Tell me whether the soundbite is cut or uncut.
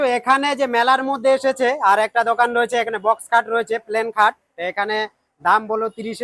uncut